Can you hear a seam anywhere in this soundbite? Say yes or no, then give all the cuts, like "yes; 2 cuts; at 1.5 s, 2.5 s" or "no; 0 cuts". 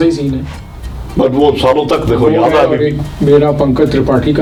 no; 0 cuts